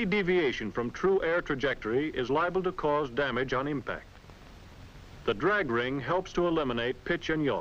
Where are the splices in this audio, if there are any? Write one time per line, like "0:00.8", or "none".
none